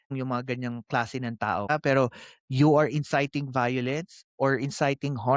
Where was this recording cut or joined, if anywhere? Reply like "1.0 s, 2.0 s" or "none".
1.7 s

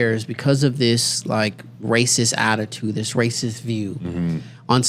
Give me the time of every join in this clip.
none

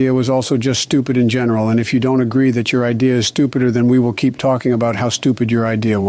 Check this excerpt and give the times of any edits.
none

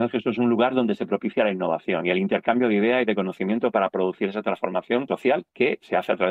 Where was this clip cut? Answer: 5.1 s

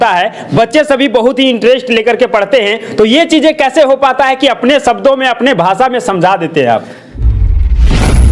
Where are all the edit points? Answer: 7.0 s

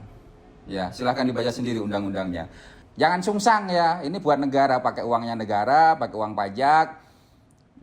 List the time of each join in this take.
2.8 s

